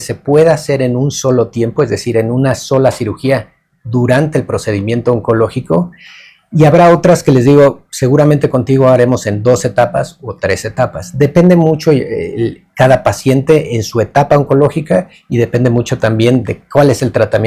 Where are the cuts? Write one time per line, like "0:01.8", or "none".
none

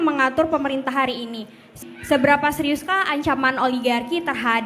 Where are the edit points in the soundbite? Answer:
0:01.8

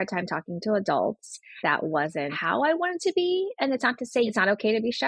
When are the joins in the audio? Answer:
0:01.6
0:02.4
0:04.3

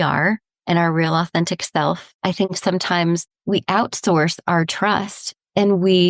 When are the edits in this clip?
0:02.1
0:03.3

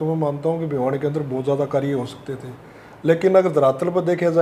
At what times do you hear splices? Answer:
none

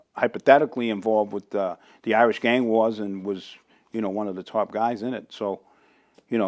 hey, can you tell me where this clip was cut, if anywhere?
none

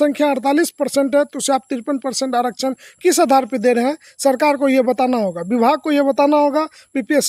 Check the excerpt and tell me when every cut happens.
none

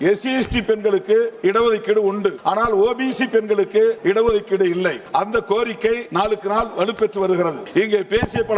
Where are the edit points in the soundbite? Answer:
0:01.3
0:02.4
0:04.0
0:05.0
0:06.1
0:07.6

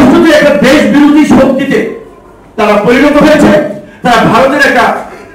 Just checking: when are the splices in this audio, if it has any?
none

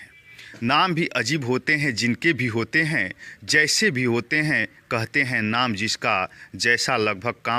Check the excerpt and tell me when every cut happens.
none

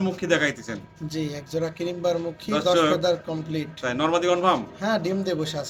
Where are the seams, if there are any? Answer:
none

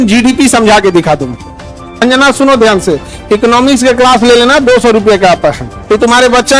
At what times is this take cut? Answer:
0:02.0
0:05.7

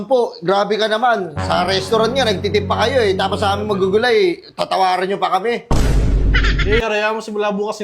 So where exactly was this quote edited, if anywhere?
0:06.8

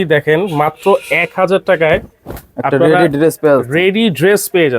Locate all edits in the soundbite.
none

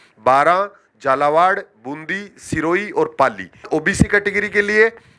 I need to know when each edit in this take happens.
0:03.6

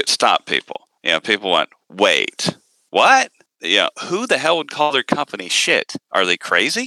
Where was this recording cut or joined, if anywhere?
0:03.5

